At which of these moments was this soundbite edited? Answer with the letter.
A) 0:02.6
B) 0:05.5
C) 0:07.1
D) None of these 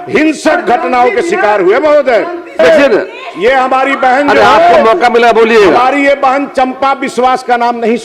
A